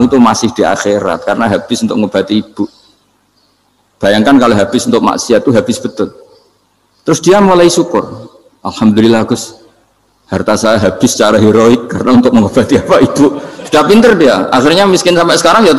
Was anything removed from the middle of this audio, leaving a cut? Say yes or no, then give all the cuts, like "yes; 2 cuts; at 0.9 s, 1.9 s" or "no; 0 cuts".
no; 0 cuts